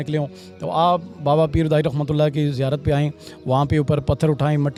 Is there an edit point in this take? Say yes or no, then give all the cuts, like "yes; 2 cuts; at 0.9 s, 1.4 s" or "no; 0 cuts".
no; 0 cuts